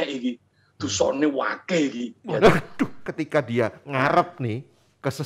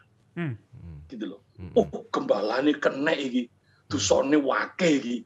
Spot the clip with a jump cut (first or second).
first